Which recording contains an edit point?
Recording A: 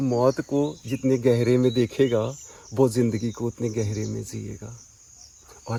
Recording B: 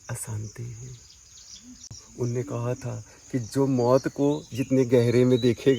B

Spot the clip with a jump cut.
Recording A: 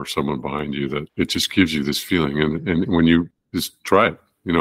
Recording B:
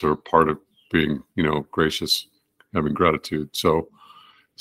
A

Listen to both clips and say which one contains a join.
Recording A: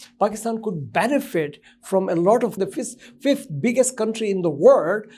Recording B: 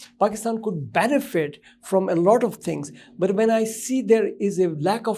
A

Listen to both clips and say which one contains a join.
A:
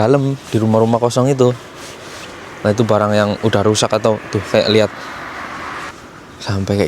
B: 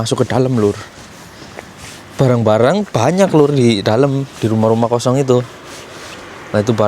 A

